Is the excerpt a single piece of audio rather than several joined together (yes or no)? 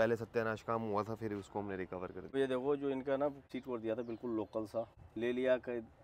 no